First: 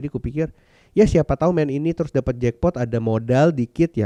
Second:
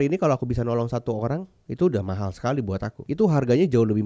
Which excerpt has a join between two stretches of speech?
second; 2 cuts; at 1.6 s, 2.9 s

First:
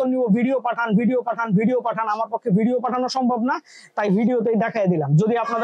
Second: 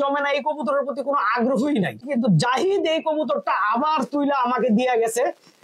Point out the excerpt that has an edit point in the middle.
second; 1 cut; at 2.1 s

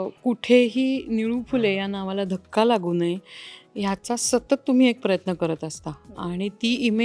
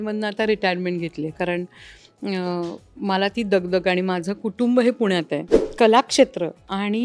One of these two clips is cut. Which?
second; 1 cut; at 5.6 s

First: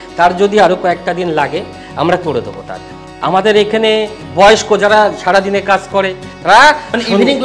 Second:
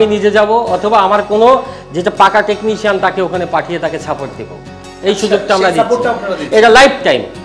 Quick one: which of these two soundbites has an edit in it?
first; 2 cuts; at 3.1 s, 6.2 s

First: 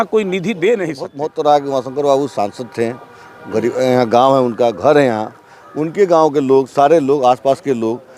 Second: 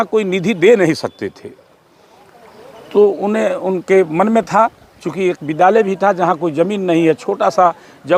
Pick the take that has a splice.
first; 1 cut; at 1.0 s

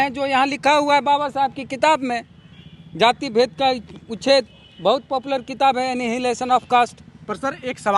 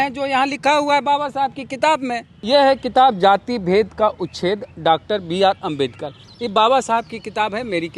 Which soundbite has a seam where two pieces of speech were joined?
second; 1 cut; at 2.3 s

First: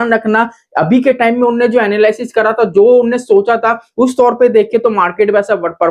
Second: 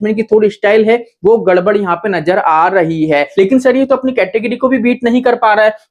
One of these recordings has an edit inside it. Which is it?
second; 1 cut; at 3.3 s

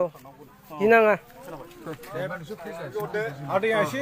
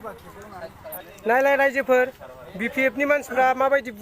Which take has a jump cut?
second; 1 cut; at 1.1 s

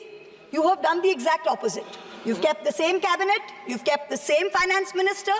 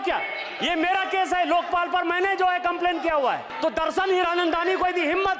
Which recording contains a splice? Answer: second; 1 cut; at 3.5 s

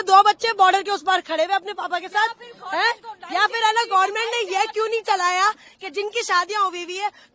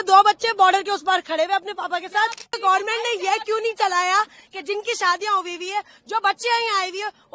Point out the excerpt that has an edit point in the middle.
second; 1 cut; at 2.6 s

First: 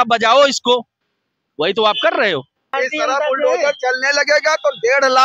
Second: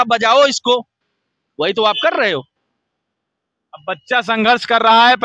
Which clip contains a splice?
first; 1 cut; at 2.7 s

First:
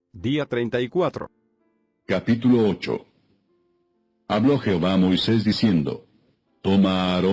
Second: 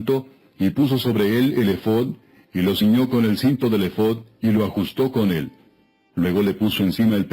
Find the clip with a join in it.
second; 1 cut; at 5.8 s

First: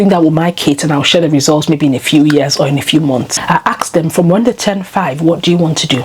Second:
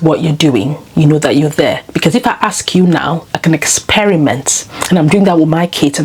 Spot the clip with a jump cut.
first; 1 cut; at 3.4 s

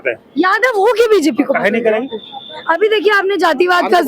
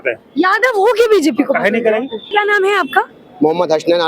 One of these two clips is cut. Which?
second; 1 cut; at 2.3 s

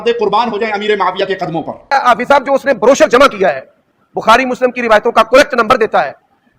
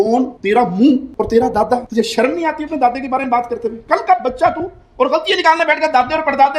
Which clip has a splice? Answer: first; 1 cut; at 1.8 s

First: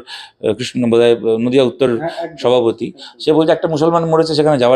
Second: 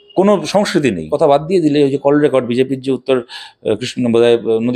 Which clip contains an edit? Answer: second; 1 cut; at 1.0 s

